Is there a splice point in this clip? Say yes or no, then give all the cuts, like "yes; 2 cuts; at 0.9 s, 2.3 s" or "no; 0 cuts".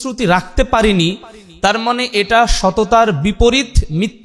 no; 0 cuts